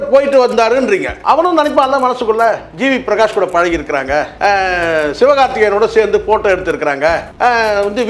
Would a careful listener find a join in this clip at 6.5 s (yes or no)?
no